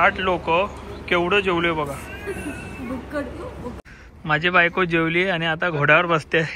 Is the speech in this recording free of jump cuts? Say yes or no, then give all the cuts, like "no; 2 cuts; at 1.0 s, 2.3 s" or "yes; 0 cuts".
no; 1 cut; at 3.8 s